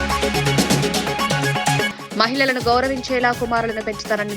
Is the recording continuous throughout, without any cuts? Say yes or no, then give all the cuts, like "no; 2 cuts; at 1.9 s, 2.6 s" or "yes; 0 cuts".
no; 1 cut; at 1.9 s